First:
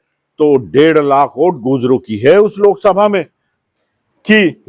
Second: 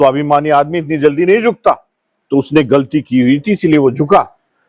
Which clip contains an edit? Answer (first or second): first